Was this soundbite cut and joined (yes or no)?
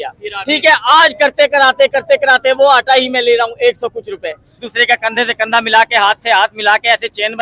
yes